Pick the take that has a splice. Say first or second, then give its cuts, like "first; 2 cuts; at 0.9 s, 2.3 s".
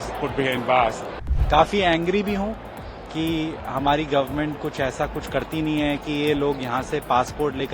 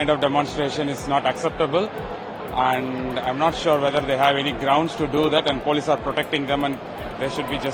first; 1 cut; at 1.3 s